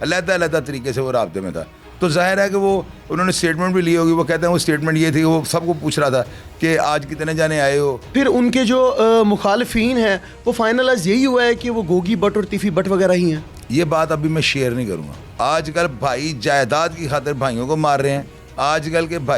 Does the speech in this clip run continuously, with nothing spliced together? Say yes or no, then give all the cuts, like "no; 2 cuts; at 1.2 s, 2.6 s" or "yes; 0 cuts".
no; 2 cuts; at 8.1 s, 15.2 s